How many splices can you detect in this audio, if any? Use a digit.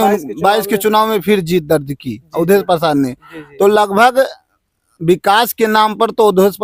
0